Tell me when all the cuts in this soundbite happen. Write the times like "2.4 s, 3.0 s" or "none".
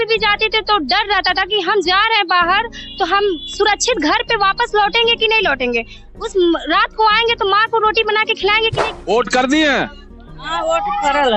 8.7 s